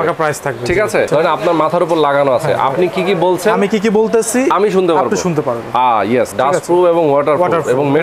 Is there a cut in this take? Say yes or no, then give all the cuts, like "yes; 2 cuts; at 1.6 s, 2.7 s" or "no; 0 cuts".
yes; 2 cuts; at 1.1 s, 6.3 s